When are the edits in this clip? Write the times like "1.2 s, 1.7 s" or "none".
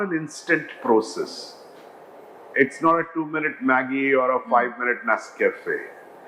none